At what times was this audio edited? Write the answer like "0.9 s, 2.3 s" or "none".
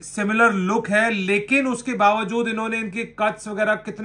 none